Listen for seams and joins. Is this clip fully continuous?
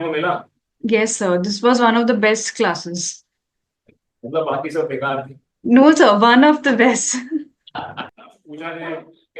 no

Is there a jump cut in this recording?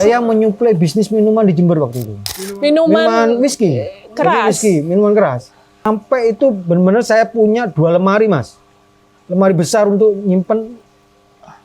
yes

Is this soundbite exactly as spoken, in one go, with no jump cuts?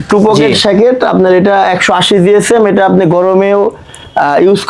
yes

